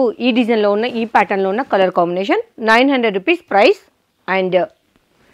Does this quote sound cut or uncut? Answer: uncut